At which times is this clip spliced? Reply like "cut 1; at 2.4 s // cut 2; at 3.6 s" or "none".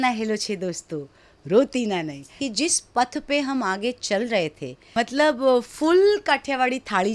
cut 1; at 2.4 s // cut 2; at 4.9 s